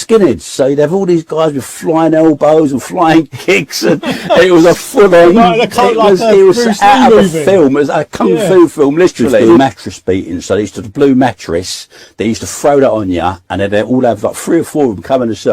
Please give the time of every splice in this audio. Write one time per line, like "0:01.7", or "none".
0:09.4